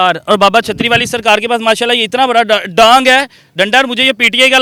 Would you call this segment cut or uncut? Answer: uncut